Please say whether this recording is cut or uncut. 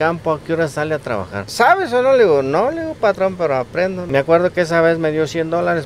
cut